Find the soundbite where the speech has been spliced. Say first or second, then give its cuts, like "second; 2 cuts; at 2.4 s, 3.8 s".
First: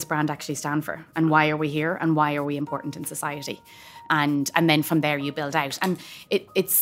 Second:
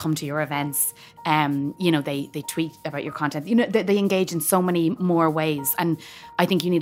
first; 1 cut; at 4.0 s